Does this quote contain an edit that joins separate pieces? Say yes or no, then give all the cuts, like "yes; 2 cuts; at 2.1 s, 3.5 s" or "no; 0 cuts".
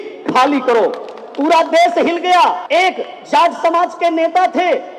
yes; 1 cut; at 2.6 s